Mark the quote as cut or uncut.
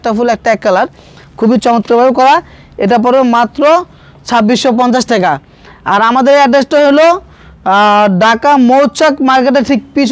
uncut